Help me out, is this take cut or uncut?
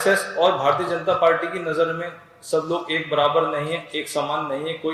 uncut